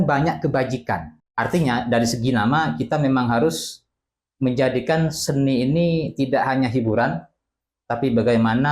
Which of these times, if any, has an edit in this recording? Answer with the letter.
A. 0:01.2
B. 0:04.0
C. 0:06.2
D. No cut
A